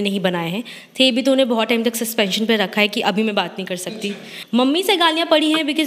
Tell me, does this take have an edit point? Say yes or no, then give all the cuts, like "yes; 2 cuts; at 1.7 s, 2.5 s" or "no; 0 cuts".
yes; 1 cut; at 4.3 s